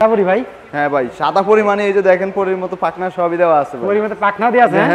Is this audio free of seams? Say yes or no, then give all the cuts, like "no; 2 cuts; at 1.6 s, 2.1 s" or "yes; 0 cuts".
yes; 0 cuts